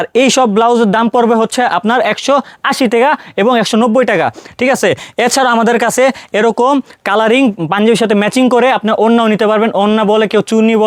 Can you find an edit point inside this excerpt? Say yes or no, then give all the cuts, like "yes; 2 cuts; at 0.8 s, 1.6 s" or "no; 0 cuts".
no; 0 cuts